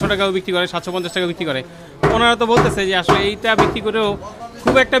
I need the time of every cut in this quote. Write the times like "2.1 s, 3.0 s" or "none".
none